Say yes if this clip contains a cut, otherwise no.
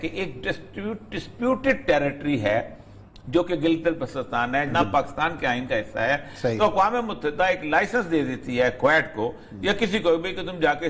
yes